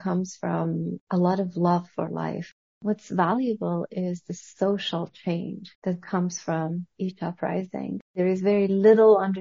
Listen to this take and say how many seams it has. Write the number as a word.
four